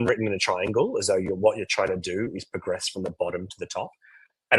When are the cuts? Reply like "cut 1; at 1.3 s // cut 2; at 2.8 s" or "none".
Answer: none